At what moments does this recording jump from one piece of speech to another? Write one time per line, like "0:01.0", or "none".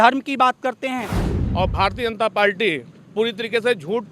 0:01.3